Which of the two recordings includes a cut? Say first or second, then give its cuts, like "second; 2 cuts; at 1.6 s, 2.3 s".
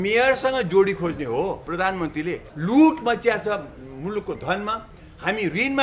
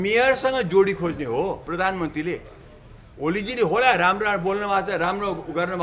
first; 1 cut; at 2.5 s